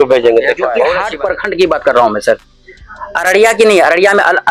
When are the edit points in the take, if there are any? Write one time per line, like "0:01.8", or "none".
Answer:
0:01.0